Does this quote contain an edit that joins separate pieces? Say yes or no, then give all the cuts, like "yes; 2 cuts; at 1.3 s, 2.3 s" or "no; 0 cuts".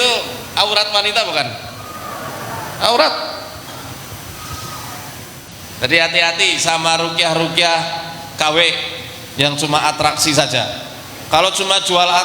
yes; 1 cut; at 5.5 s